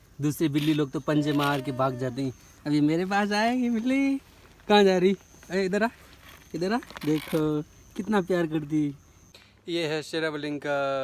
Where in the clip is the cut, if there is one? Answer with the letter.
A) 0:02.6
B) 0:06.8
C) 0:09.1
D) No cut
C